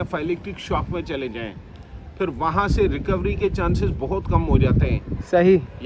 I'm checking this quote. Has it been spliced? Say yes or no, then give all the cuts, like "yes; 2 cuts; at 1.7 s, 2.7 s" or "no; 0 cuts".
no; 0 cuts